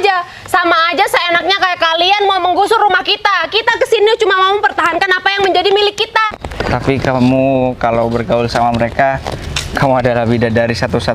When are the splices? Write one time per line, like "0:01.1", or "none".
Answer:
0:06.3